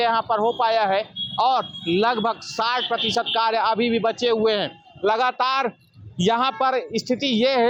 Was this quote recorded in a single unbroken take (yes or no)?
yes